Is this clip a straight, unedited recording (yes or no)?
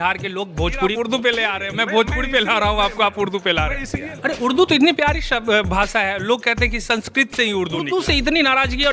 no